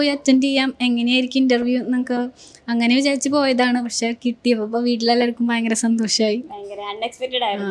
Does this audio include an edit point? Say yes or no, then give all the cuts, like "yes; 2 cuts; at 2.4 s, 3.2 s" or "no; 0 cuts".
no; 0 cuts